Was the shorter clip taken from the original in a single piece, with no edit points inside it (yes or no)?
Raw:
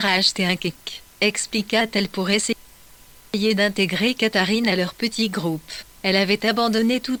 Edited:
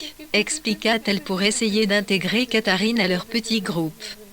no